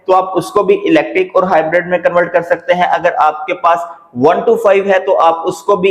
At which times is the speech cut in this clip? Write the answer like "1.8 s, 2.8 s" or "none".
none